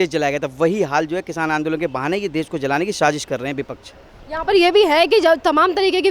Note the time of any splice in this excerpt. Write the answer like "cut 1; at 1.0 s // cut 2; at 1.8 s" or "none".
none